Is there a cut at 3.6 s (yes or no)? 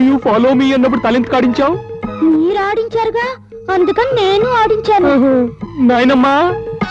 no